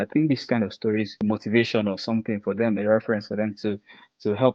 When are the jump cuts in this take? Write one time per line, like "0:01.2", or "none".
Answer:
0:01.1